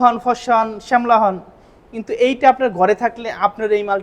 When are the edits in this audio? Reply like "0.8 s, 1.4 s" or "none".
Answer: none

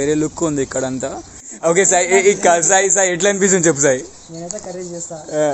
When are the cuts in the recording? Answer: 1.5 s

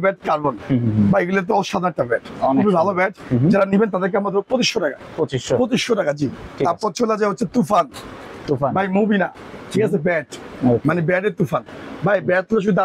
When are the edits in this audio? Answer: none

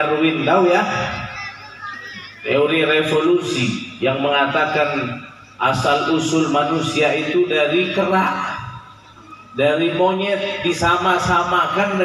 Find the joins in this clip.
none

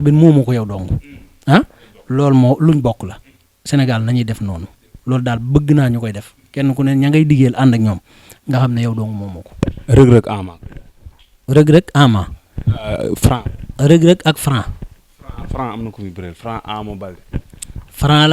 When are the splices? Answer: none

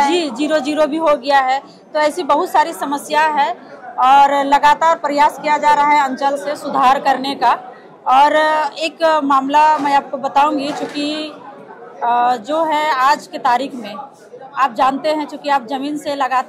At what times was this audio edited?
none

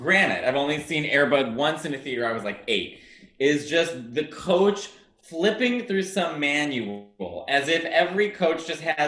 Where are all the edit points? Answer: none

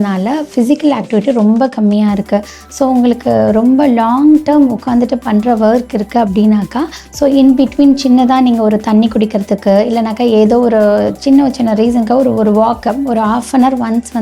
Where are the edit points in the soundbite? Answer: none

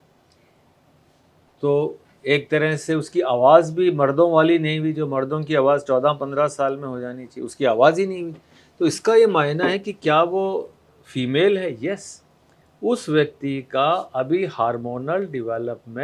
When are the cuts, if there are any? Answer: none

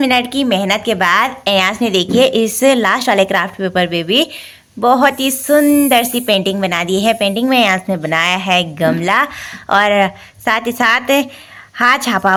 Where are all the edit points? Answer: none

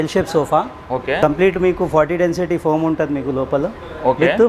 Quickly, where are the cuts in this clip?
1.2 s

